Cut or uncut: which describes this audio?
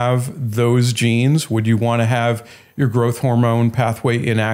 uncut